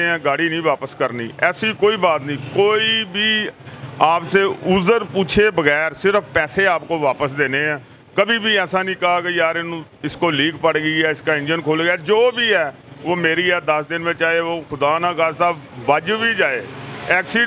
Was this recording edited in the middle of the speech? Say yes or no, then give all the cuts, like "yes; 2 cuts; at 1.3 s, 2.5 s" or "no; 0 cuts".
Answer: no; 0 cuts